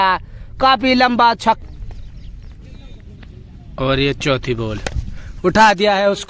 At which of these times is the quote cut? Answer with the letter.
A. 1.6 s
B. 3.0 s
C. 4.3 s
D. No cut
A